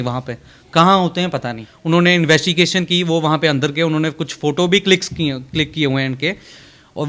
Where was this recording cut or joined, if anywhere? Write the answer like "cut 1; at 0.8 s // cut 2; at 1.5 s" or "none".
cut 1; at 1.7 s